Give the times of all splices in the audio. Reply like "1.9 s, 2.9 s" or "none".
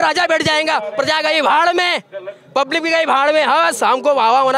none